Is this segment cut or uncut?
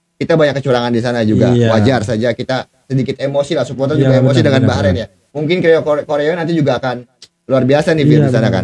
uncut